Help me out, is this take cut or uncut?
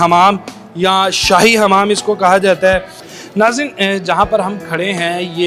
uncut